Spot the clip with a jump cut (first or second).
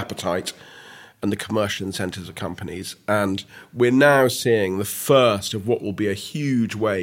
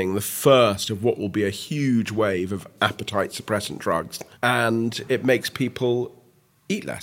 second